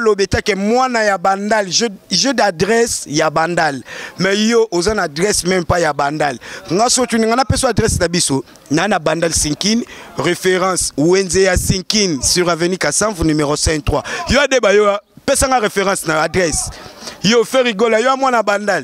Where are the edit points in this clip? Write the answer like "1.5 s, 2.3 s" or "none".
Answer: none